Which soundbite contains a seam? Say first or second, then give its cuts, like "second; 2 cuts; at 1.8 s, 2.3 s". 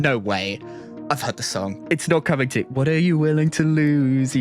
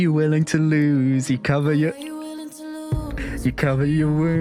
first; 1 cut; at 1.8 s